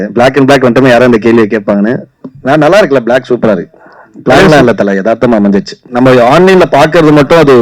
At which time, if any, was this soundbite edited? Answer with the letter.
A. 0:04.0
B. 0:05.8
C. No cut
B